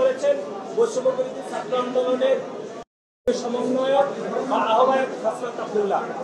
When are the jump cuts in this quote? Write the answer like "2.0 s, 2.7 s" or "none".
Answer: none